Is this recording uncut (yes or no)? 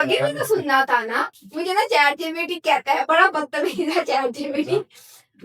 no